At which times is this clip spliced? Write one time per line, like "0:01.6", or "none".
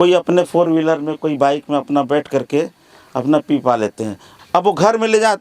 0:04.3